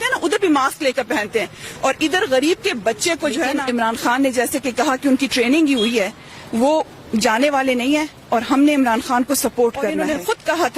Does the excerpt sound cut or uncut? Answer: cut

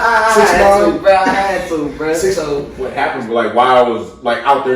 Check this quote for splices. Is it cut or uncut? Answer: cut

